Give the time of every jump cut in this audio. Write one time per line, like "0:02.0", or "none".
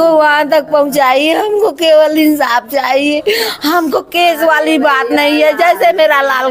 none